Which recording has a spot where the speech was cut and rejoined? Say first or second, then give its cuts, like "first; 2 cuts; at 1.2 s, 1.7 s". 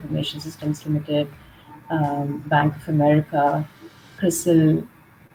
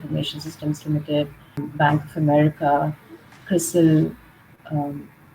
second; 1 cut; at 1.7 s